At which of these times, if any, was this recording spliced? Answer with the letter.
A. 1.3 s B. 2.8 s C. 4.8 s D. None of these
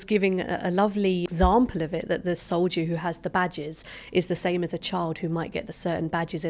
A